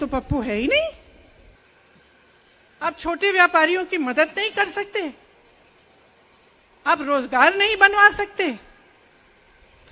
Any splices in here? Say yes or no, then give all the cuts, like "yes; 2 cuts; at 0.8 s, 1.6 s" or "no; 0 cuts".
yes; 1 cut; at 1.6 s